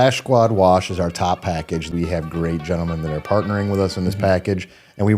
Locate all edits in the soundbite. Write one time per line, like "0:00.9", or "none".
0:01.9